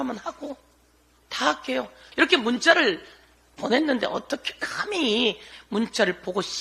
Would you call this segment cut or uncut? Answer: cut